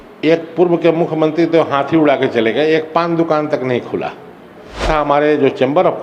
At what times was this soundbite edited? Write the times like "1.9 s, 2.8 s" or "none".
4.8 s